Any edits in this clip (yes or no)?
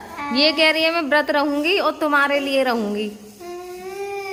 no